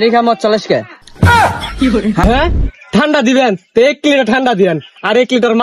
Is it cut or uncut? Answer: cut